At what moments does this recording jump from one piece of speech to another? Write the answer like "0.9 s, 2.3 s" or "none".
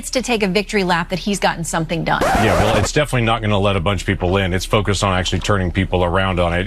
2.3 s

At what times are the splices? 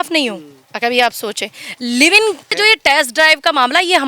2.5 s

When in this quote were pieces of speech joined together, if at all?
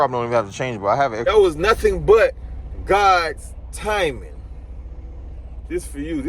1.2 s

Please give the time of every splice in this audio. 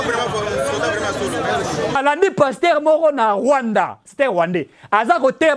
2.0 s

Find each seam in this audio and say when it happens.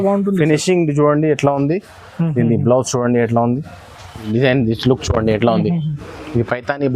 4.2 s

